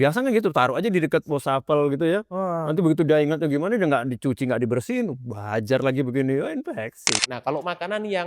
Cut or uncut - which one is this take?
cut